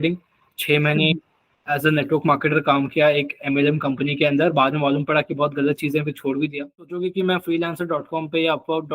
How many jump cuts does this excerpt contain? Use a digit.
1